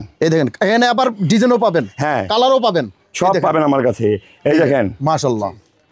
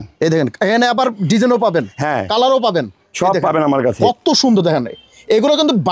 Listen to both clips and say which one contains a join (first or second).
second